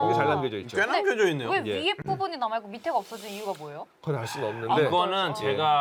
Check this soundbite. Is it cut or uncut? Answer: uncut